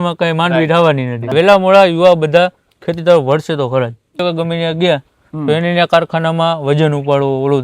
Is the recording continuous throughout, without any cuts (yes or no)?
no